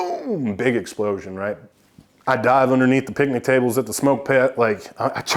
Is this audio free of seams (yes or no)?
no